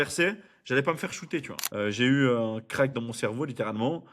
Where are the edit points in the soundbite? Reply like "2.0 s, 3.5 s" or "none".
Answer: 1.6 s